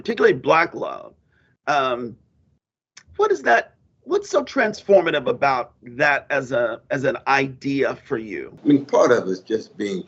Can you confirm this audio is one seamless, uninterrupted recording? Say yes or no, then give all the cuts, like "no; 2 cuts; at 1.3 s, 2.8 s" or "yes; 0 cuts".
no; 1 cut; at 8.5 s